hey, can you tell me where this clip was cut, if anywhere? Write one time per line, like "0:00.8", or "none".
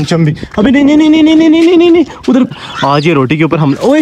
0:02.5